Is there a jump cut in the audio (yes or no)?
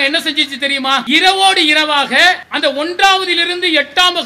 yes